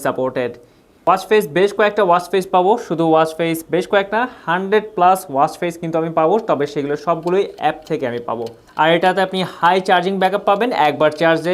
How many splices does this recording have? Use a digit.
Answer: 2